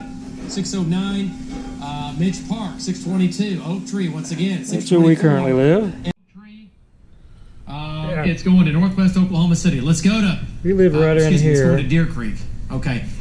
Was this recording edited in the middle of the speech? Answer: yes; 1 cut; at 6.1 s

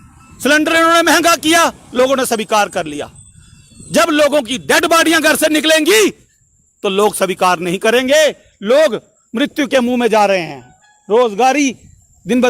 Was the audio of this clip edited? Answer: no; 0 cuts

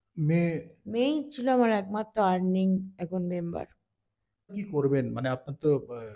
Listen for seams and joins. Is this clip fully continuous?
no; 1 cut; at 4.5 s

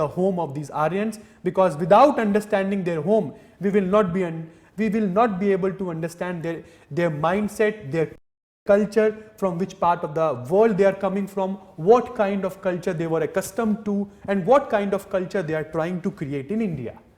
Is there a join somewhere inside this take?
no; 0 cuts

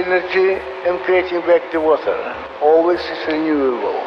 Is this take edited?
yes; 1 cut; at 2.4 s

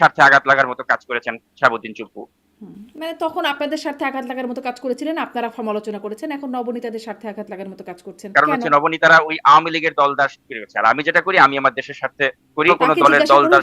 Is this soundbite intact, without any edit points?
no; 2 cuts; at 8.3 s, 12.7 s

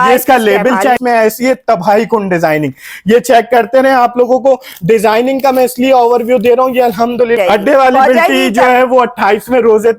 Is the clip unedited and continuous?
no; 2 cuts; at 1.0 s, 7.4 s

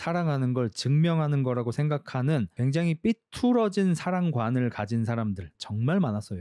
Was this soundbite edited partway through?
yes; 1 cut; at 5.5 s

